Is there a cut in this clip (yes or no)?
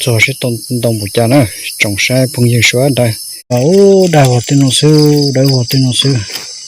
yes